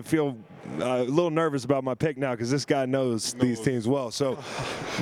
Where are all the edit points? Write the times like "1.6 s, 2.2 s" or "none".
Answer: none